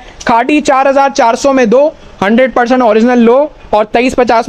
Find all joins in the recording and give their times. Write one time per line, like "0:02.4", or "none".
none